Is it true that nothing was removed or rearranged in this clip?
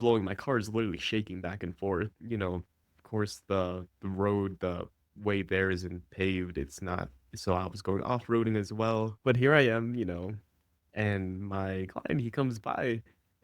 no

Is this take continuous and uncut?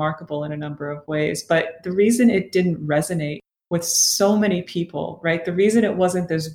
yes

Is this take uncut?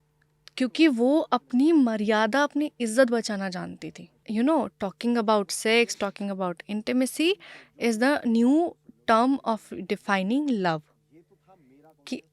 no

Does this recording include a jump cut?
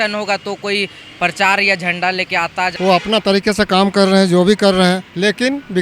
yes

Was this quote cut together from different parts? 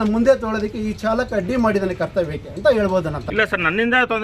yes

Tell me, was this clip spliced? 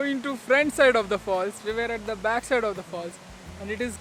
no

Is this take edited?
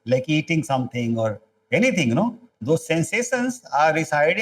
yes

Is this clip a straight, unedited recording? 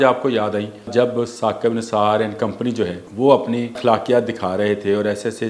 no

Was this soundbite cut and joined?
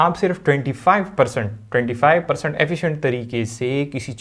no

